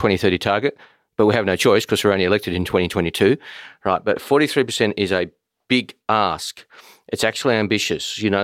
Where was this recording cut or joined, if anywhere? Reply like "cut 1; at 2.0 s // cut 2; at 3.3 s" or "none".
none